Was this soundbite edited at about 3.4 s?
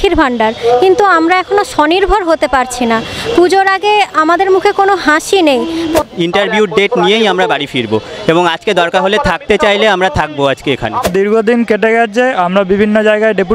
no; 2 cuts; at 6.0 s, 11.0 s

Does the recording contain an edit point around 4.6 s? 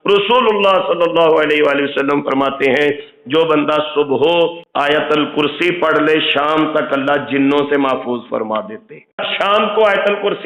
yes; 2 cuts; at 4.6 s, 9.3 s

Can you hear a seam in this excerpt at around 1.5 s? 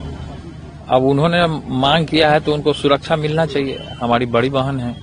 no; 0 cuts

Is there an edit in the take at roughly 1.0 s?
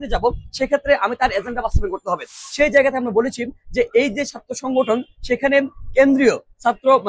no; 1 cut; at 2.4 s

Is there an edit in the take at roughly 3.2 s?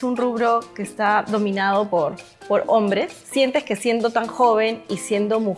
yes; 1 cut; at 3.2 s

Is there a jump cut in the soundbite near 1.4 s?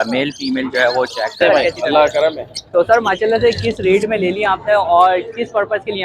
yes; 1 cut; at 1.4 s

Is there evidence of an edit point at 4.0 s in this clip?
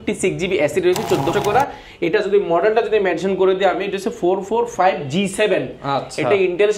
no; 1 cut; at 1.3 s

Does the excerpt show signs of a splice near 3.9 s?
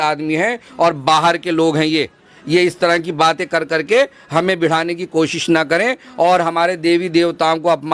no; 0 cuts

